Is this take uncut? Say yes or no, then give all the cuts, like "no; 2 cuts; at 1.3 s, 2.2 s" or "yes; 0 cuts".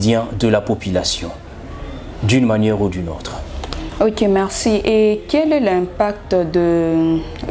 yes; 0 cuts